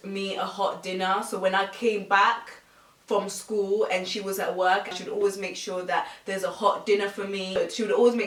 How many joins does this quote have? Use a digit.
0